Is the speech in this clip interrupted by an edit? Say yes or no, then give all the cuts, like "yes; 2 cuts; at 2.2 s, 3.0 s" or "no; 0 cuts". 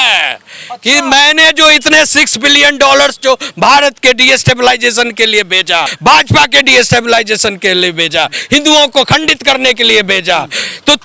yes; 1 cut; at 5.9 s